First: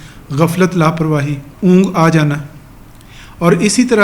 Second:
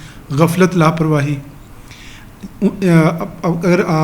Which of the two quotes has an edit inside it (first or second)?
first